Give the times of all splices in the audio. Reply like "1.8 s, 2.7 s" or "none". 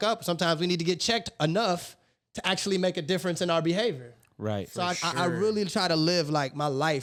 none